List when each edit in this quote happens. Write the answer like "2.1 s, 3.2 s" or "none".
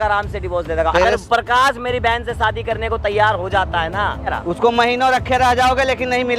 0.9 s, 4.3 s